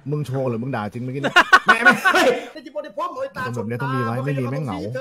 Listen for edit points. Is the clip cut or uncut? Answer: cut